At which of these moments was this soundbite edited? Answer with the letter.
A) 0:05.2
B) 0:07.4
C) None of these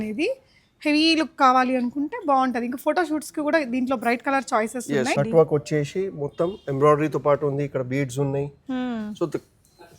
A